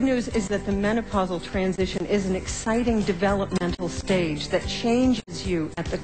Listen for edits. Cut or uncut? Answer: uncut